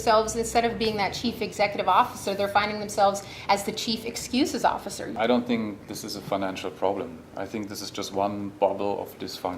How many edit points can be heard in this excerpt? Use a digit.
1